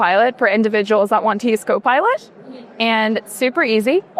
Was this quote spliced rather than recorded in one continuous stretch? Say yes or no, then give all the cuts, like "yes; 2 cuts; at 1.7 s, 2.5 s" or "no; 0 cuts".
no; 0 cuts